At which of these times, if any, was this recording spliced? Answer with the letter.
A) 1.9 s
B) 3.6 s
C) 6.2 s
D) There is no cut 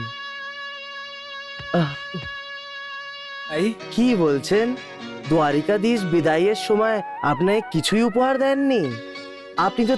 B